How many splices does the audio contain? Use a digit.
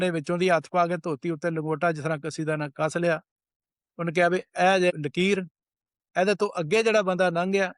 1